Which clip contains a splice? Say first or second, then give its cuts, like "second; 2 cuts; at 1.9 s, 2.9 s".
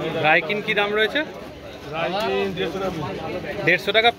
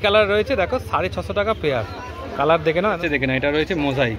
second; 1 cut; at 3.0 s